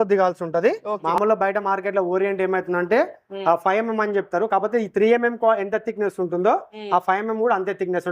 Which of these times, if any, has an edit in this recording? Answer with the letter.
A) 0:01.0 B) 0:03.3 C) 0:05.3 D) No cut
A